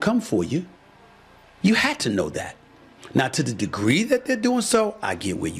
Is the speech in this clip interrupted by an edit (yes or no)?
no